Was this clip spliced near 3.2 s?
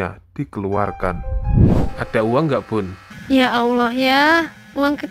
no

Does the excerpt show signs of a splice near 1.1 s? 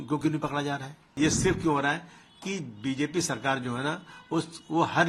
yes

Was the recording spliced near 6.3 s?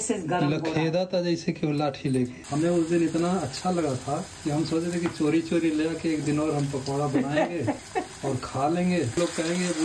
no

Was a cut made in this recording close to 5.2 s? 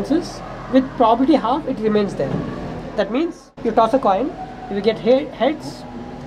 no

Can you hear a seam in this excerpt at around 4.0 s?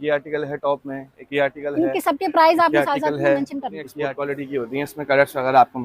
yes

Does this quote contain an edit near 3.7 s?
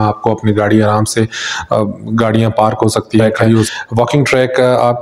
yes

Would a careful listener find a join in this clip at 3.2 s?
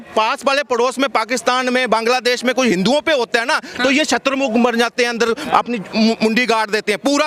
no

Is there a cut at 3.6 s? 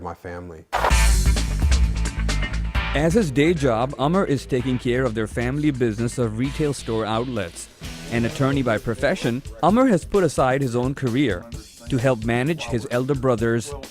yes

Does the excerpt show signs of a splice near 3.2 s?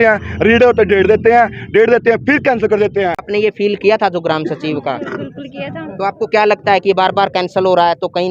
yes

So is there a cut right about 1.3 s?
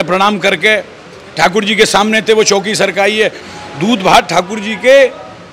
no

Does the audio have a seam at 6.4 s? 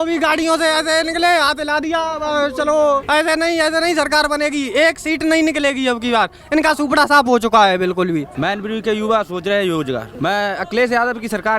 no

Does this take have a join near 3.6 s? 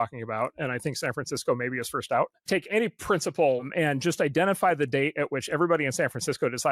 yes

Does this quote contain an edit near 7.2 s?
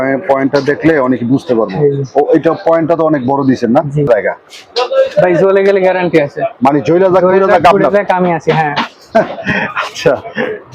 no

